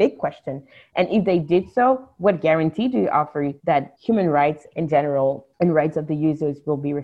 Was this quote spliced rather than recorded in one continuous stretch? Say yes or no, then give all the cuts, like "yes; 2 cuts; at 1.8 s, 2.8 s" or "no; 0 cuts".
yes; 2 cuts; at 3.8 s, 5.5 s